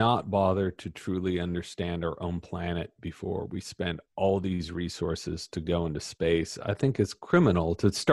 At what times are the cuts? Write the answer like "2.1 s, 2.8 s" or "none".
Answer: none